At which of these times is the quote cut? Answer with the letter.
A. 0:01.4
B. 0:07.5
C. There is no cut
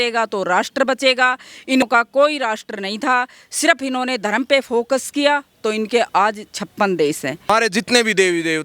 B